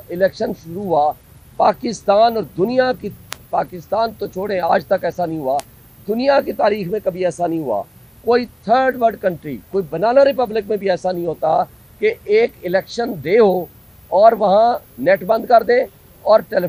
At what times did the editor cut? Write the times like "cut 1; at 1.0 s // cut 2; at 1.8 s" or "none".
none